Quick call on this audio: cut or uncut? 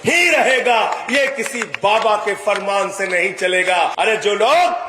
cut